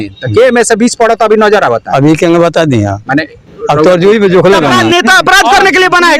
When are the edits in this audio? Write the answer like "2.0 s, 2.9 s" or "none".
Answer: 4.7 s

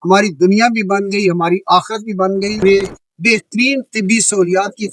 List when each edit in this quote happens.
2.6 s

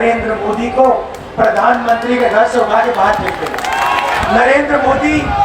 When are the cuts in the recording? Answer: 4.2 s

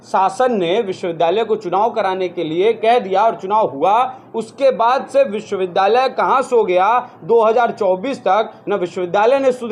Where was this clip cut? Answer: none

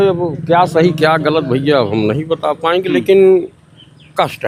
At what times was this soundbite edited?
none

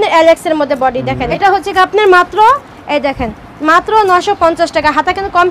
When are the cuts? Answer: 1.3 s

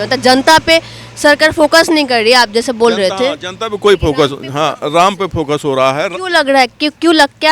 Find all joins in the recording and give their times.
none

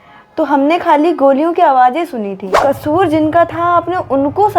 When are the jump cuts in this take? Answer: 2.4 s

